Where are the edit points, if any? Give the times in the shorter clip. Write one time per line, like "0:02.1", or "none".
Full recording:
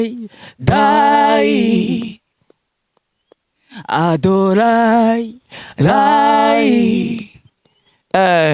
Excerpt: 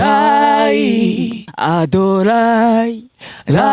0:01.4